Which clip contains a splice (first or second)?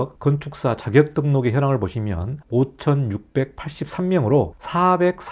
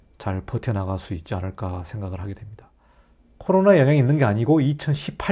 second